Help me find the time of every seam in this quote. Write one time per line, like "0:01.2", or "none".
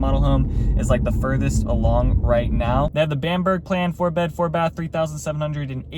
0:02.9